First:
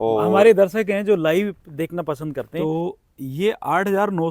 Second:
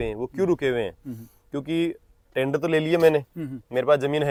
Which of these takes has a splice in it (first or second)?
first